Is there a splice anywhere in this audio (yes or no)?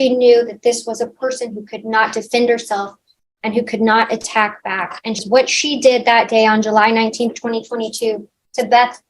yes